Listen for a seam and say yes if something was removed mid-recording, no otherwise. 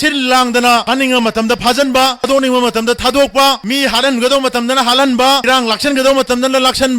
yes